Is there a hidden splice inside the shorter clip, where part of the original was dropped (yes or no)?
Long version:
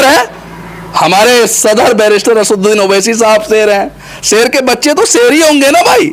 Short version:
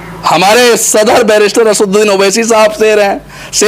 no